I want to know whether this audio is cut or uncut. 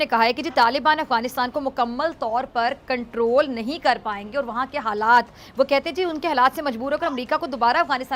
uncut